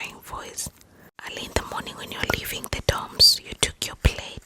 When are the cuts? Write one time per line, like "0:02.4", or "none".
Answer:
0:01.3